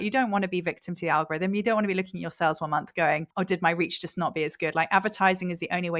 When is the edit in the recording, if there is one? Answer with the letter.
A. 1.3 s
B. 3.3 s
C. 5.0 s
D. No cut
B